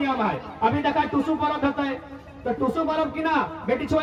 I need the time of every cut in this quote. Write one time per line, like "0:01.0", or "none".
none